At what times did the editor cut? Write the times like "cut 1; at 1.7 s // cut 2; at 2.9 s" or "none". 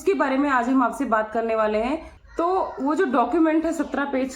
cut 1; at 2.1 s